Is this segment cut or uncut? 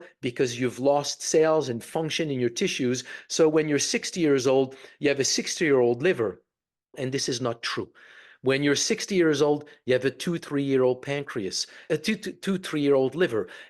cut